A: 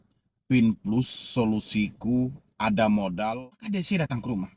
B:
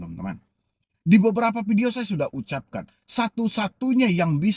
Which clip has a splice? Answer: A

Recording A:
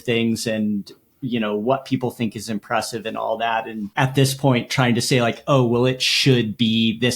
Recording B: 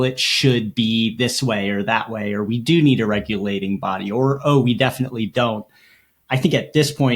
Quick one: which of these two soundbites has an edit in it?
A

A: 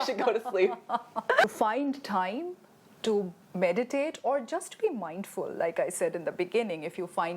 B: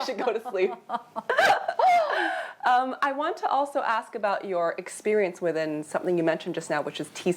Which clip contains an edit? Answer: A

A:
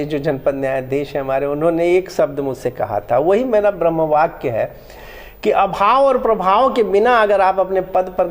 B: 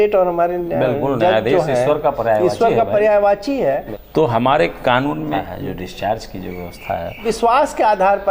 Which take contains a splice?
B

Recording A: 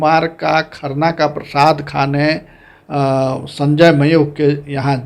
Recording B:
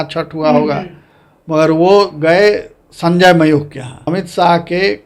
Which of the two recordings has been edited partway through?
B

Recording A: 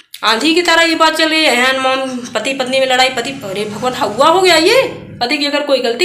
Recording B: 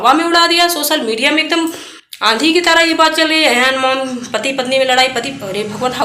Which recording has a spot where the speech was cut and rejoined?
A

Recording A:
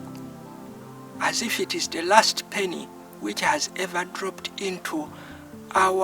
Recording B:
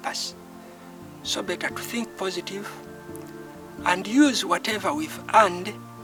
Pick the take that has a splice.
A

